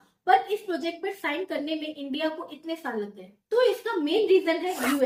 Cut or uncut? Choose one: uncut